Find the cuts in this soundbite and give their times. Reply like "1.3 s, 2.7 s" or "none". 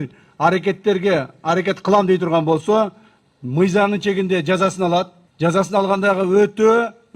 5.2 s

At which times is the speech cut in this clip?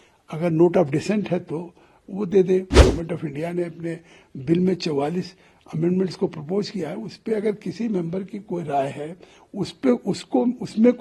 2.7 s

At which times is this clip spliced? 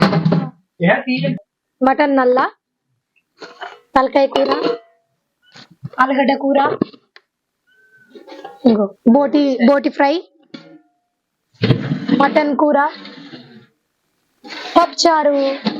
1.3 s

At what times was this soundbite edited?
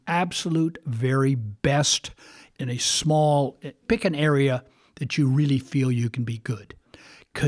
none

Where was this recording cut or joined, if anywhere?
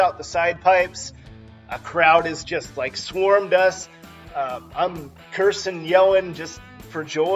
1.0 s

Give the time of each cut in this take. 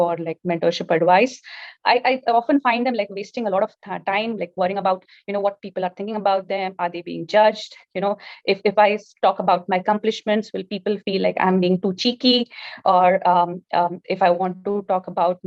none

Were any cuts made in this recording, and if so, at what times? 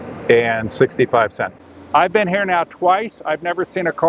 1.5 s

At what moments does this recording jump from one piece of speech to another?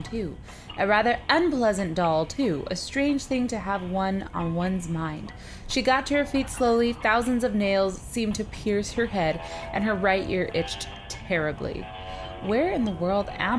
4.5 s

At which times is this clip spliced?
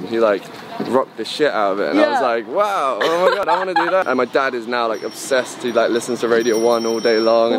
3.5 s

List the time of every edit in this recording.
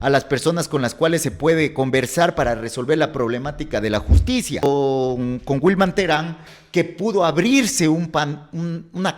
4.7 s

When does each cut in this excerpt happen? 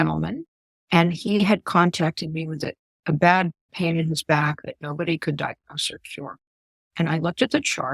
3.7 s

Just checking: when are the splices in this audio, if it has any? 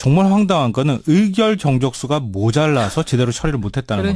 1.2 s

